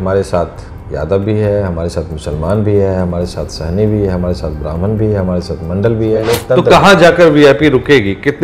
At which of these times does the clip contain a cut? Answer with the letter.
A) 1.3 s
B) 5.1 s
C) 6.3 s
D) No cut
C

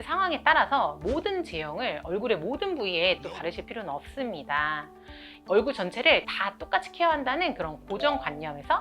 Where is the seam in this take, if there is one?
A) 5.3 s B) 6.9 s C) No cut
A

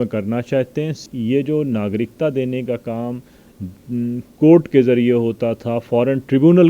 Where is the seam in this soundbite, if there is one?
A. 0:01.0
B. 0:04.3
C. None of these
A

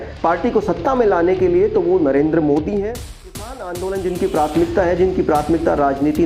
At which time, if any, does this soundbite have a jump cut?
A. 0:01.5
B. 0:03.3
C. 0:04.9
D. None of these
B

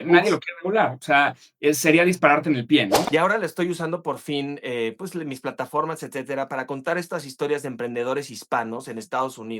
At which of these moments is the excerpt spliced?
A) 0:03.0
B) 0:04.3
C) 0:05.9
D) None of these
A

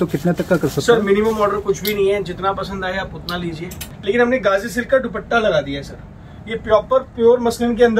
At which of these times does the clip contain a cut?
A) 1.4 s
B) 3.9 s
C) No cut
B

